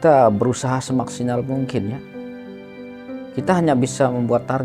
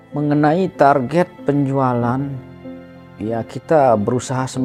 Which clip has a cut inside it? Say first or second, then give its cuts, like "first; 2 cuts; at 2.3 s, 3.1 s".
first; 2 cuts; at 2.0 s, 3.3 s